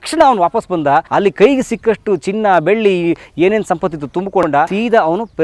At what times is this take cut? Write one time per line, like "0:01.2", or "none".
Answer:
0:01.1
0:04.5